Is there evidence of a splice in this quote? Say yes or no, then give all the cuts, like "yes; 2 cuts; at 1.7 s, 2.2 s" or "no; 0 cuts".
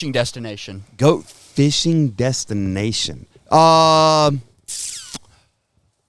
no; 0 cuts